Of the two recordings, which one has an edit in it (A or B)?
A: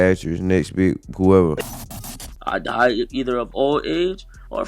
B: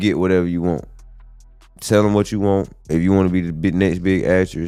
A